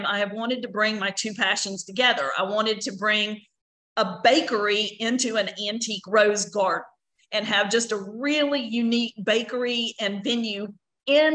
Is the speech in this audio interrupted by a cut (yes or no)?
no